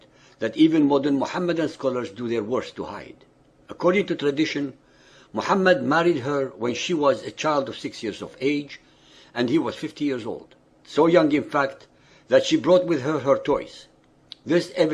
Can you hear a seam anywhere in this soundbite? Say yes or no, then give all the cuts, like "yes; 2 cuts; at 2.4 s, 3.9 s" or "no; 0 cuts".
no; 0 cuts